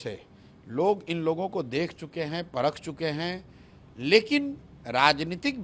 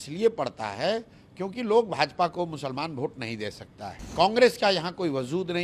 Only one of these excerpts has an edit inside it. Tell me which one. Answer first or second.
second